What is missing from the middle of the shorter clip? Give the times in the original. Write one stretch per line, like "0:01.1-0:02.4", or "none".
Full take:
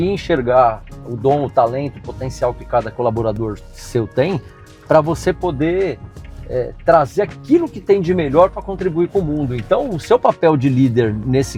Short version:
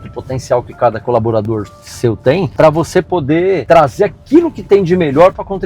0:04.4-0:04.8
0:05.9-0:06.8